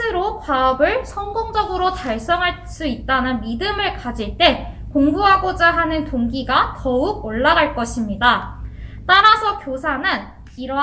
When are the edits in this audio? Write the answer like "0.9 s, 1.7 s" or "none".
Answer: 8.6 s